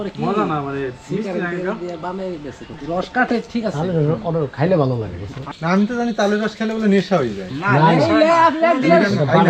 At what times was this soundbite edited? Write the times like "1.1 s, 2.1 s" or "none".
5.4 s